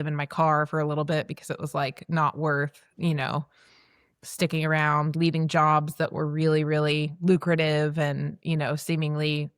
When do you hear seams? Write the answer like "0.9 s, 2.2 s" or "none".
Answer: none

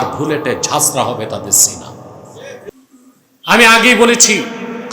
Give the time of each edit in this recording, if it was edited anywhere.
2.7 s

